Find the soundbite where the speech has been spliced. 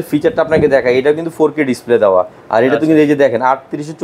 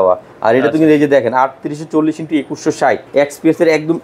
second; 1 cut; at 3.0 s

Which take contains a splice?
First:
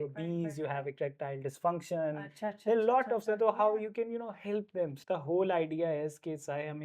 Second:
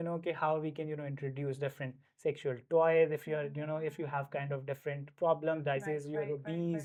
first; 1 cut; at 5.0 s

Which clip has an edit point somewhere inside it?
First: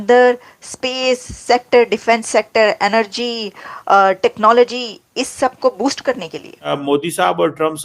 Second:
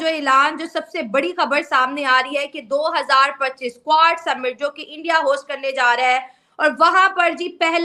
first; 1 cut; at 6.8 s

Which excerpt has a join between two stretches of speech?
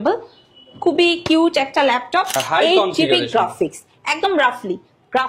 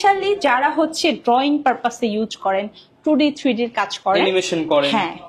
first; 1 cut; at 2.4 s

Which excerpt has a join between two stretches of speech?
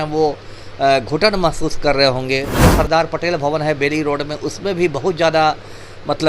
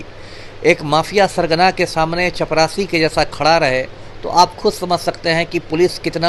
first; 1 cut; at 2.6 s

